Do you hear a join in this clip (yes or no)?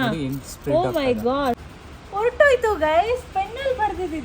yes